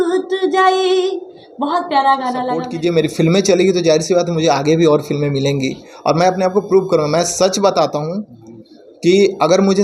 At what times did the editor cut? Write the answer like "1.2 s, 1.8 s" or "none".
2.7 s